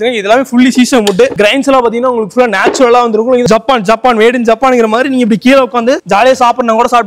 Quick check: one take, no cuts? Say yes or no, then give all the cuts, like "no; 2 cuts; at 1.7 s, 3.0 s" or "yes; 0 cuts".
no; 1 cut; at 3.4 s